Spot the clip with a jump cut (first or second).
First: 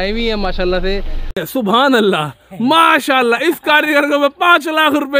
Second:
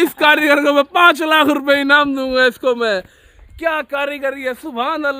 first